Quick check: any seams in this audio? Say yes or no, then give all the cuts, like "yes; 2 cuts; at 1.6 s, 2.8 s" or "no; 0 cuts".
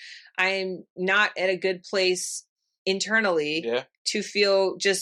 no; 0 cuts